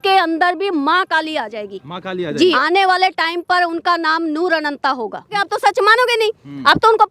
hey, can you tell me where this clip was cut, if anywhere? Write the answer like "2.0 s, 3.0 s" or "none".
2.6 s, 5.4 s